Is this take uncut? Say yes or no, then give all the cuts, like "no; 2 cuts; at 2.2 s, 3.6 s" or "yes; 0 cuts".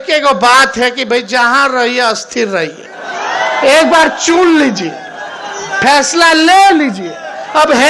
yes; 0 cuts